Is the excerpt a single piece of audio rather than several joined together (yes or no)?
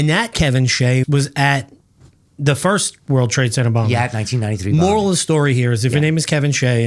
no